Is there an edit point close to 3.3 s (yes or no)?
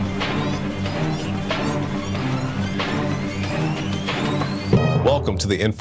no